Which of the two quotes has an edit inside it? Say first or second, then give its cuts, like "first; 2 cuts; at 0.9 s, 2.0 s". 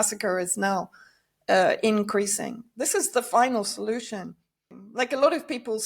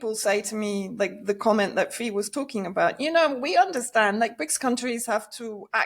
first; 1 cut; at 4.7 s